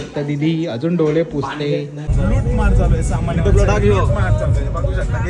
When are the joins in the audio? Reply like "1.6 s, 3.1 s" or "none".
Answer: 2.0 s